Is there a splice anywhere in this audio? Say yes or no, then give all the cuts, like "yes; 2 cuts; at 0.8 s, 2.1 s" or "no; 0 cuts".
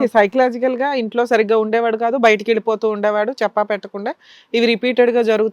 no; 0 cuts